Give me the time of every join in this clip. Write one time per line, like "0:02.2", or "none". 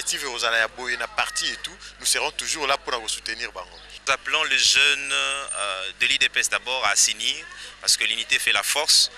0:03.8